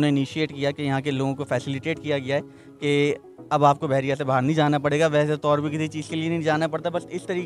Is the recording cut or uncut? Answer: uncut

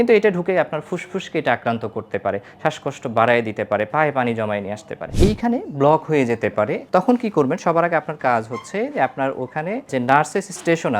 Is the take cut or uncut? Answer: cut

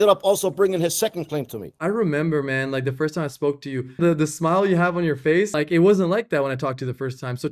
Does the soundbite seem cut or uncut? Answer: cut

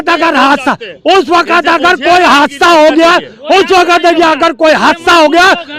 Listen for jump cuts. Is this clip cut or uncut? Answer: uncut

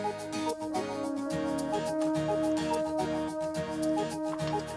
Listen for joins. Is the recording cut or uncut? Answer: uncut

